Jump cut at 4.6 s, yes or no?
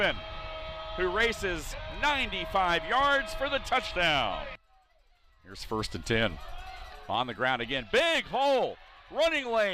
yes